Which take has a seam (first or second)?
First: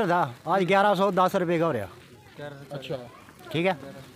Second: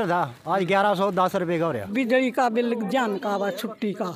second